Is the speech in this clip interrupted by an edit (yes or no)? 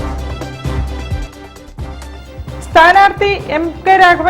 yes